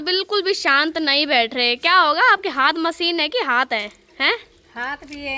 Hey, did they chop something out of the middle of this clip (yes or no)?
no